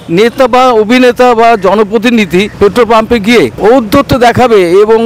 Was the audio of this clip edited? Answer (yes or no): yes